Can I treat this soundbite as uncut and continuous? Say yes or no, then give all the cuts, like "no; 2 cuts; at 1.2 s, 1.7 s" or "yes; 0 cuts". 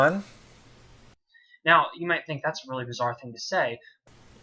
no; 1 cut; at 2.1 s